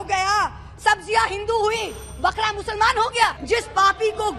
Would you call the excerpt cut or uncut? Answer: cut